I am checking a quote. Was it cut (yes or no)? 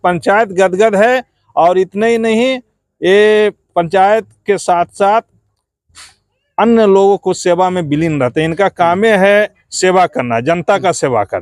no